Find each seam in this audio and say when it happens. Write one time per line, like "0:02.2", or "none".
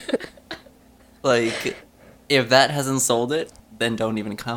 0:03.6